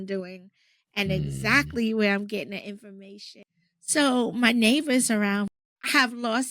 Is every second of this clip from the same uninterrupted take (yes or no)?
no